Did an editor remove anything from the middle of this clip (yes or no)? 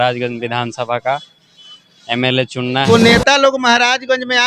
yes